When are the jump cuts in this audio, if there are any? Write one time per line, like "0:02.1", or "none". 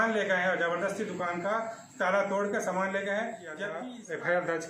0:03.7

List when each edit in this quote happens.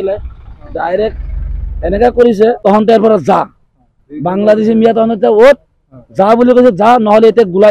0:02.6

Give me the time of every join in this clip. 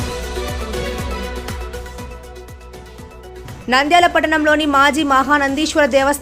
0:01.9

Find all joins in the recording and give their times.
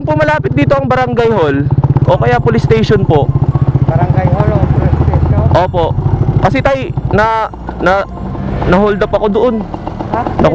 none

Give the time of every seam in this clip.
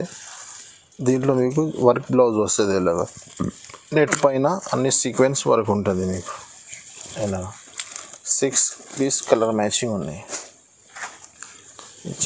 none

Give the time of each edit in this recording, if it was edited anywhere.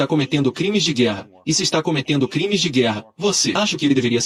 none

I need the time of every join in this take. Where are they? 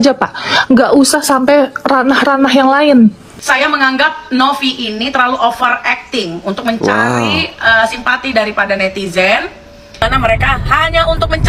0:03.3
0:10.0

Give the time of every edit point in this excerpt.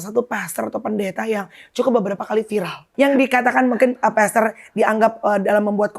0:02.8

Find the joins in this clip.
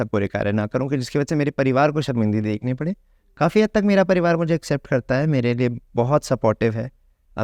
none

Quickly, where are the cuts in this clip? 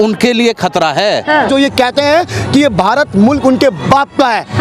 0:01.5

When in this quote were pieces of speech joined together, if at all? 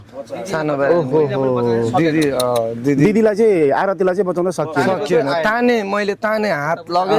none

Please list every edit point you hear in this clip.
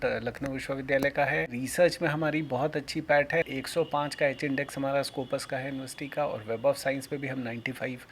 0:01.6
0:03.5

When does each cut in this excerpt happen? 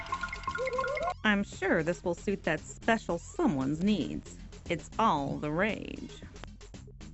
0:01.1

